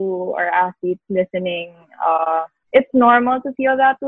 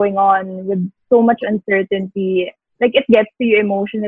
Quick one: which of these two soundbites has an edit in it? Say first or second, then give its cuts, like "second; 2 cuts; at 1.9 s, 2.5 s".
first; 1 cut; at 2.6 s